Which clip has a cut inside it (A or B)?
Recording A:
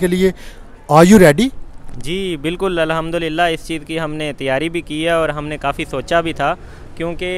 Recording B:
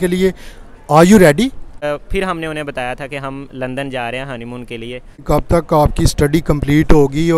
B